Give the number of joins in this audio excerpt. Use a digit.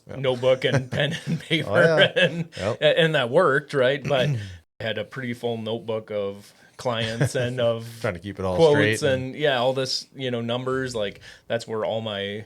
1